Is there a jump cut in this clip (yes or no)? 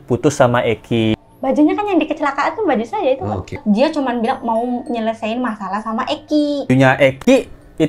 yes